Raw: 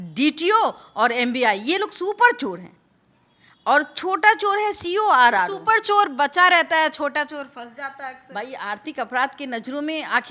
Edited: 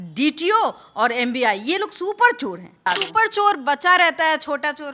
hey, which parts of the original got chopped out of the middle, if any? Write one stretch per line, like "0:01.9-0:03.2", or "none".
0:02.9-0:05.4